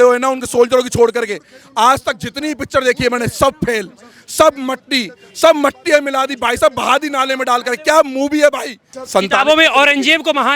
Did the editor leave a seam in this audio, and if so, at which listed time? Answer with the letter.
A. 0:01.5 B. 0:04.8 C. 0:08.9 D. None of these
C